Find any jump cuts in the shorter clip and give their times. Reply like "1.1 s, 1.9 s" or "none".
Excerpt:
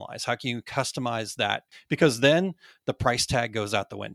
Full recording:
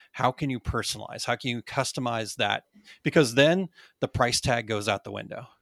1.7 s